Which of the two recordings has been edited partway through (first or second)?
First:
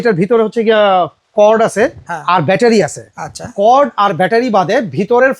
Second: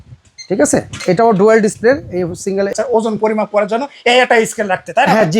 second